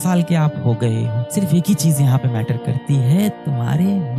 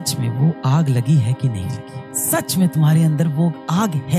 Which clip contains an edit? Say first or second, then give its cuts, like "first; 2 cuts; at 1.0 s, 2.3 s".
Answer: first; 1 cut; at 1.2 s